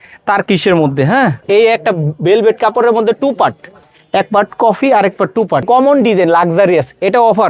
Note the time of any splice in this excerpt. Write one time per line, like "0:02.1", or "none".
0:01.4
0:05.6